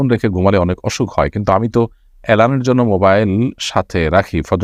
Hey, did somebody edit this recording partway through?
no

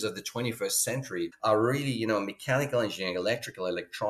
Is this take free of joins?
no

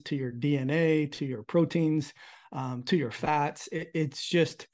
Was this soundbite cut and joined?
no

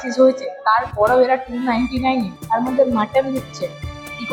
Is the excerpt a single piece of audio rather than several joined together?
no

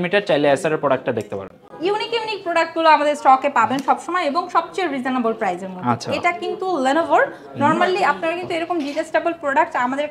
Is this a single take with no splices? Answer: yes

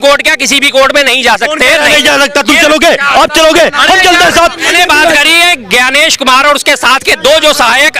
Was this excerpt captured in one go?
no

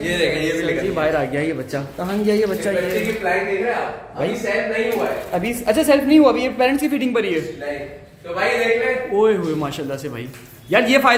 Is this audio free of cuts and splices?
yes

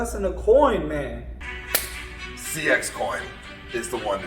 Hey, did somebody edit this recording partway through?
yes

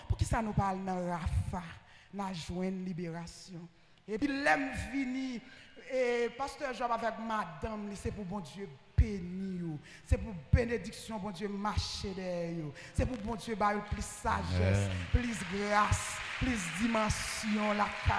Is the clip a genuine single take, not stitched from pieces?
no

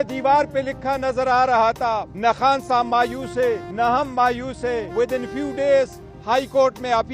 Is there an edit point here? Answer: yes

